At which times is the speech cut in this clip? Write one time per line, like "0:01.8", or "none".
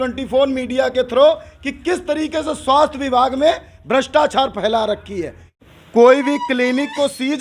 0:05.6